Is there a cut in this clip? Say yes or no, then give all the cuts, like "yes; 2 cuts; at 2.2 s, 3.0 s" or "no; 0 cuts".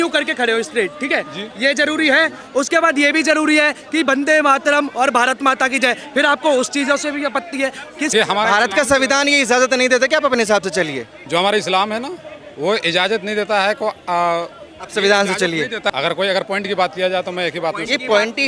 yes; 3 cuts; at 8.1 s, 11.1 s, 15.9 s